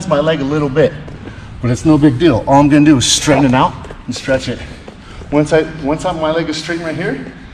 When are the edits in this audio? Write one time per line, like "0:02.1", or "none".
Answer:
none